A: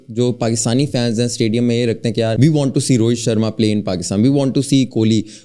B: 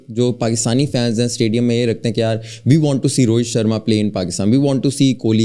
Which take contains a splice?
A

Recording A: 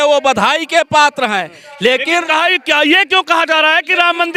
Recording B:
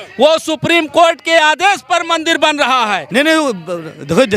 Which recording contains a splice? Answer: B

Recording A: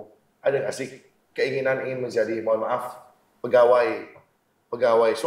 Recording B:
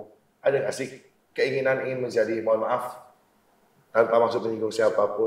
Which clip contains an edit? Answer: A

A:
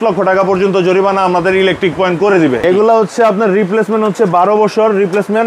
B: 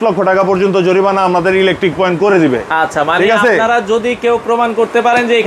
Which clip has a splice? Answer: A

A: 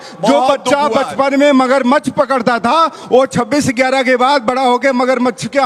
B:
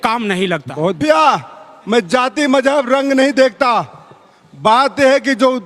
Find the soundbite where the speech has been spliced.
B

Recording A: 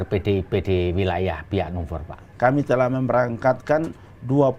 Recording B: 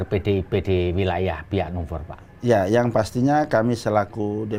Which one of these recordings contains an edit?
A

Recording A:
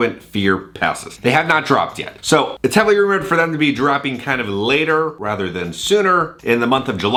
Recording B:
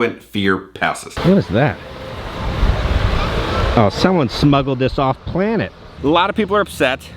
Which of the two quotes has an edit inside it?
B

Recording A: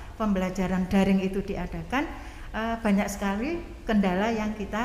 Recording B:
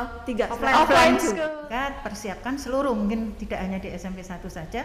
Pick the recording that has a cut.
B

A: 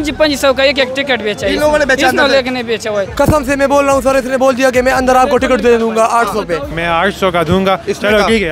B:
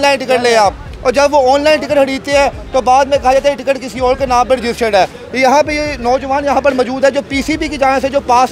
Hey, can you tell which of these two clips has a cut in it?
A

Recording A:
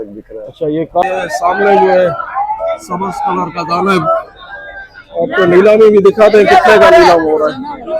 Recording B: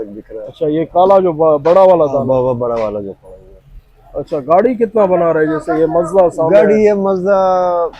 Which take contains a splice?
A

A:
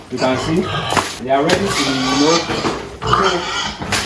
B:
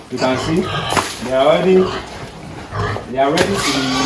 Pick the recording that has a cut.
A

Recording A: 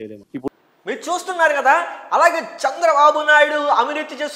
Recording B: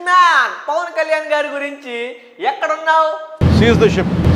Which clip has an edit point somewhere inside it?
B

